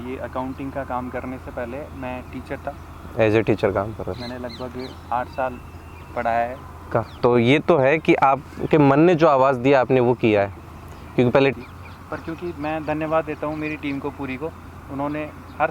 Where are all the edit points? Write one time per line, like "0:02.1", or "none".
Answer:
0:07.1
0:11.5